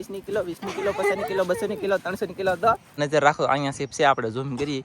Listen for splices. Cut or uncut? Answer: cut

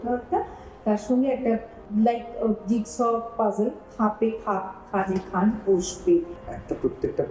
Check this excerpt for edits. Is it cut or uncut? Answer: cut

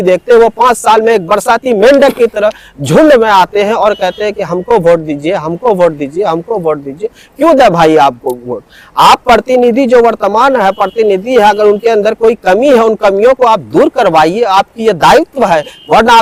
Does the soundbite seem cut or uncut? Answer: uncut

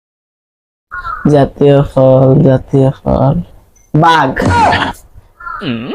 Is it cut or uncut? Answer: cut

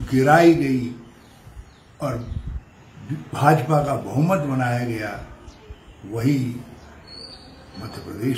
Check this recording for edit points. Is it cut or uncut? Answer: uncut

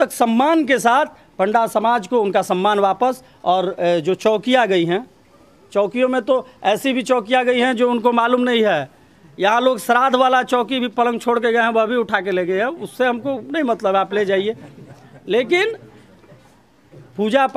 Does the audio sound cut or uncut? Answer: uncut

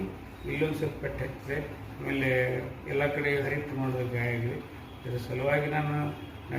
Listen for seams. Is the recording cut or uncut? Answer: cut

